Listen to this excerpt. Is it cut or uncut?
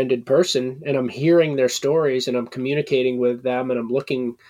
uncut